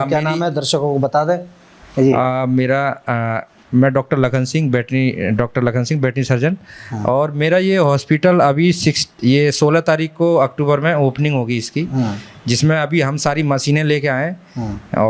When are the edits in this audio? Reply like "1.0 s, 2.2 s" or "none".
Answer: none